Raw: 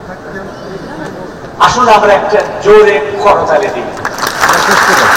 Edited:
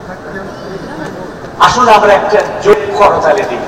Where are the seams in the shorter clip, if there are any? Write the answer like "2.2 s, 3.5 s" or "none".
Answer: 2.7 s